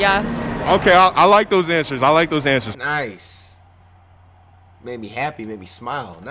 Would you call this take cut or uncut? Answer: uncut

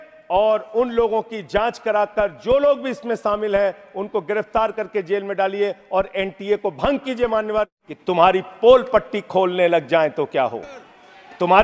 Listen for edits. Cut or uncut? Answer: cut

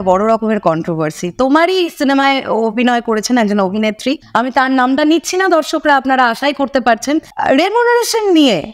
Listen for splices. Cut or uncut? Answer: cut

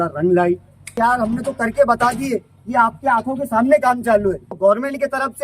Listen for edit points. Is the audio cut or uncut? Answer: cut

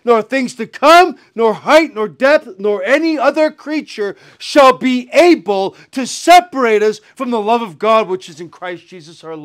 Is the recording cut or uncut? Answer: uncut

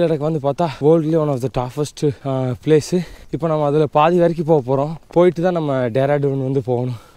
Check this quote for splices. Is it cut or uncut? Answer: uncut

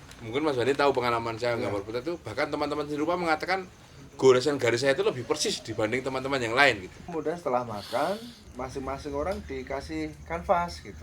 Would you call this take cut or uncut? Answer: cut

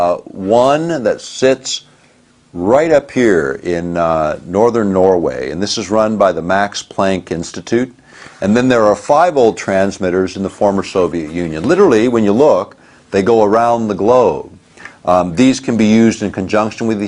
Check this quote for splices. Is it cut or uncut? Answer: cut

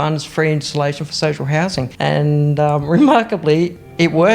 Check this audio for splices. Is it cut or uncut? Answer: cut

